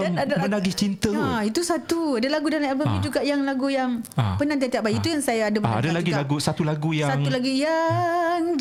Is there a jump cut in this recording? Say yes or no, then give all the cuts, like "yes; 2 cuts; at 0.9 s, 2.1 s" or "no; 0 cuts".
no; 0 cuts